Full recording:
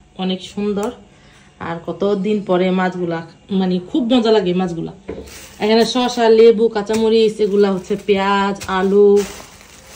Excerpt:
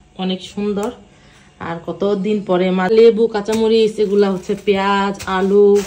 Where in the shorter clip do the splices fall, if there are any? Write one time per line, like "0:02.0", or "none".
0:02.9

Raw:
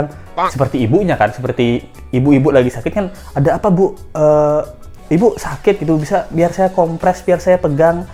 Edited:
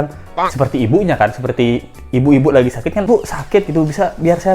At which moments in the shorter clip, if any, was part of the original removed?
0:03.1

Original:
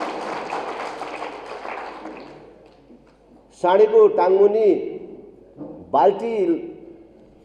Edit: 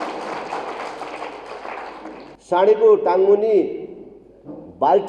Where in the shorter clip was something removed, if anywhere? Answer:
0:02.3

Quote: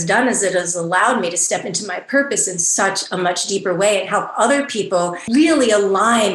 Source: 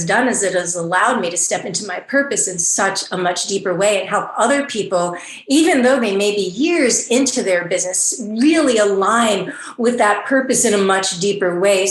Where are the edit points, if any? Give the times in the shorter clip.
0:05.2

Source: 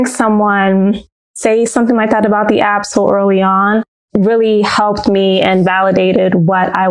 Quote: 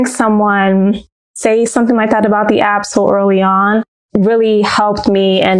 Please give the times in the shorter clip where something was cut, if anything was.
none

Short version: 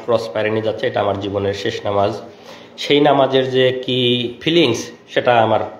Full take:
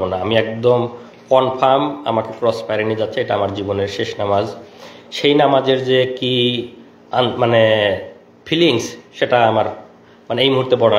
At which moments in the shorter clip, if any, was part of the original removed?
0:04.3

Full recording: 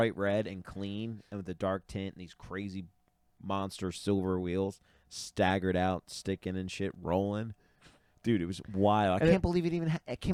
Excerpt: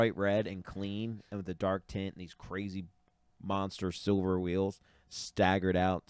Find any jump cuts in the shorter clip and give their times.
none

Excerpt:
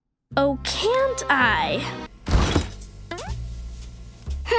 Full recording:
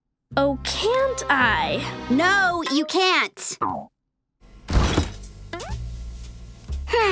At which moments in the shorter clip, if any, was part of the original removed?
0:01.9

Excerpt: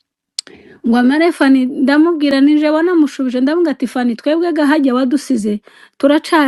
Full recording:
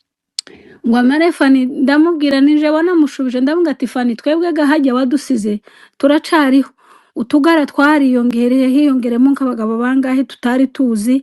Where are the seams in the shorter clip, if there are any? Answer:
none

